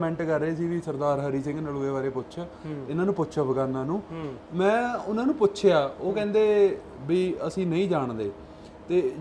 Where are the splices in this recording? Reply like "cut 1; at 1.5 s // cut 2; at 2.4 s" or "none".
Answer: none